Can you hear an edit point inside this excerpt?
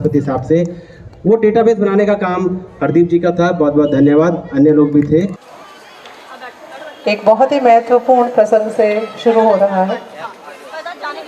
yes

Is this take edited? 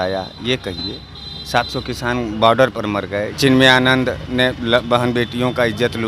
yes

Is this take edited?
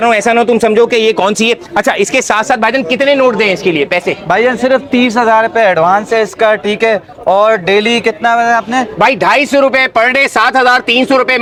no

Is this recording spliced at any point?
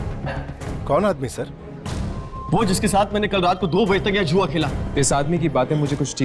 yes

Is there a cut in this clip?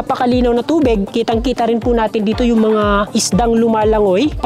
no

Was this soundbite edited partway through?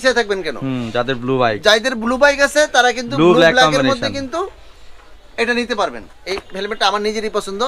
yes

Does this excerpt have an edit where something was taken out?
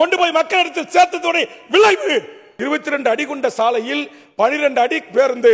yes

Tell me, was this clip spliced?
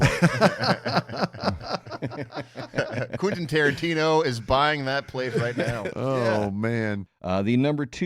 yes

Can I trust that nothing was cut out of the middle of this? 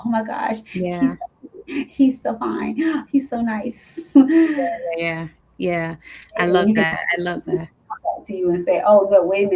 yes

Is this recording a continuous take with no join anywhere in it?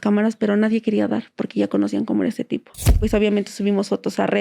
no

